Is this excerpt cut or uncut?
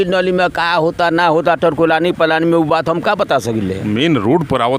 uncut